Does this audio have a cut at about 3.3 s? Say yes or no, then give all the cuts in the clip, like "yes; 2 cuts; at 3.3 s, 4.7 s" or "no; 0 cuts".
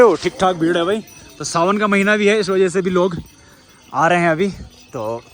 no; 0 cuts